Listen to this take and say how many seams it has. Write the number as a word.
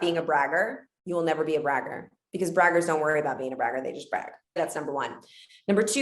one